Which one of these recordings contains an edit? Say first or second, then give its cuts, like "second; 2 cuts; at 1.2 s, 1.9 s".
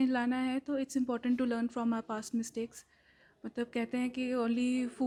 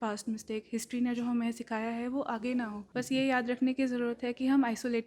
second; 1 cut; at 2.8 s